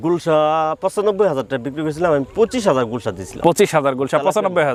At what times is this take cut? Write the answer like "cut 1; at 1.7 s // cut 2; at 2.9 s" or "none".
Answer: none